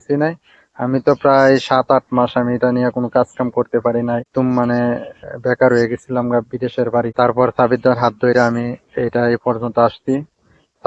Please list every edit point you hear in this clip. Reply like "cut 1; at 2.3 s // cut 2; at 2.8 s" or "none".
cut 1; at 4.3 s // cut 2; at 7.1 s